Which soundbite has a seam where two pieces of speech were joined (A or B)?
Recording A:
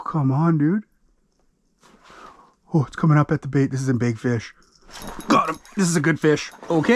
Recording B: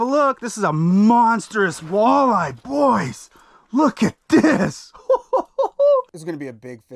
B